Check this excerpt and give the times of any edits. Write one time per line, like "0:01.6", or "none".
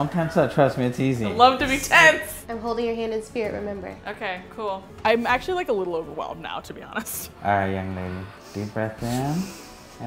0:02.3
0:05.0
0:07.2